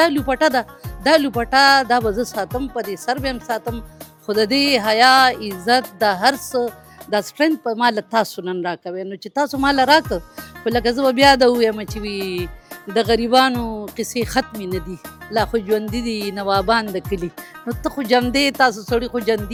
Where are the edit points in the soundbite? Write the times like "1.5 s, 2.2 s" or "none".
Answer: none